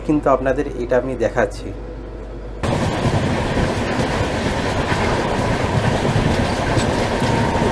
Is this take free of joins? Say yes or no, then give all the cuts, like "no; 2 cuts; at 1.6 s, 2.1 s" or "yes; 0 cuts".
yes; 0 cuts